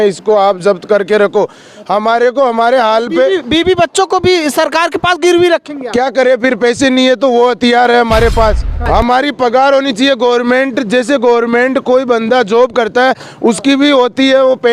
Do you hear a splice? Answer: yes; 1 cut; at 8.7 s

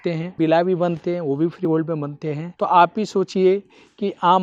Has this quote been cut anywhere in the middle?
no; 0 cuts

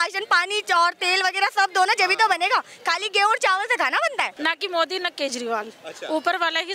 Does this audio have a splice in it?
yes; 1 cut; at 4.3 s

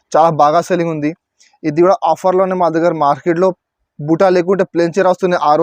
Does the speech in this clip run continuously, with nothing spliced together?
yes; 0 cuts

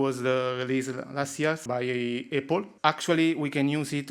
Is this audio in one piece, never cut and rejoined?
no; 2 cuts; at 1.6 s, 2.7 s

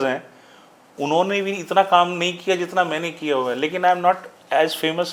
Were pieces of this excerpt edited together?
no; 0 cuts

